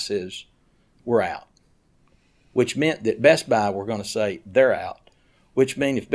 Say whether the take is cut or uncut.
uncut